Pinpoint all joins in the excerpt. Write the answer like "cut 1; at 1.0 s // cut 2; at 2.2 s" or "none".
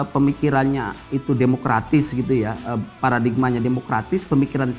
none